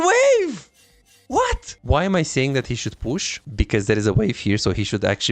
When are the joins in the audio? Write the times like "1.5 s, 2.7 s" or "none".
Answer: 1.7 s, 3.4 s